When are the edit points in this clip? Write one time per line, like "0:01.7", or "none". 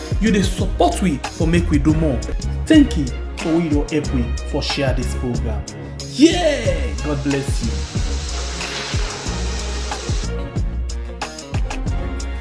none